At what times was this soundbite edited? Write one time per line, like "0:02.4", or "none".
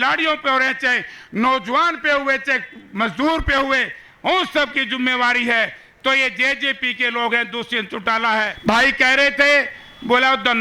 0:08.5